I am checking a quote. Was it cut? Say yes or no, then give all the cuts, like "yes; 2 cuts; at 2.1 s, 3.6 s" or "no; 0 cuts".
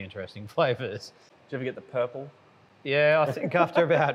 yes; 1 cut; at 1.3 s